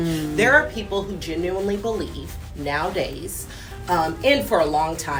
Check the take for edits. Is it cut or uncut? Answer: uncut